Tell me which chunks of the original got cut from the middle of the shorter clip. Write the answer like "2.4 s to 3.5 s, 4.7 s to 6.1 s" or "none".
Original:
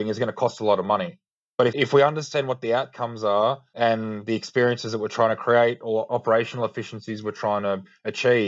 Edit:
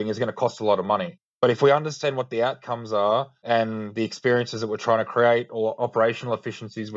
1.6 s to 1.9 s